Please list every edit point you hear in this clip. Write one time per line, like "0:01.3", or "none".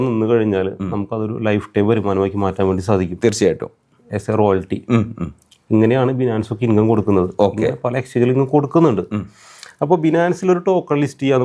none